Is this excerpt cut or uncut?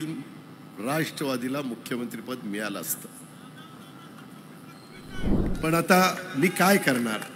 cut